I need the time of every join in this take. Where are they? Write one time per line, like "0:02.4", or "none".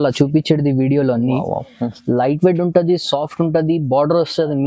none